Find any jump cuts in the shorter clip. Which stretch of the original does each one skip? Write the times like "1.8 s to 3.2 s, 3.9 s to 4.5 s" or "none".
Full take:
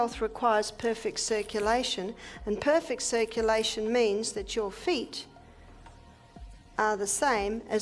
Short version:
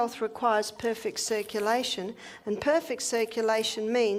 none